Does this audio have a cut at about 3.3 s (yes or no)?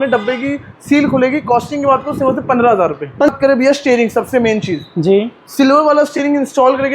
yes